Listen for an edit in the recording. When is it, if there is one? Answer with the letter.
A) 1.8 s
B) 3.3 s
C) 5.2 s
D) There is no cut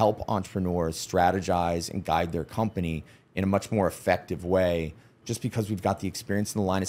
C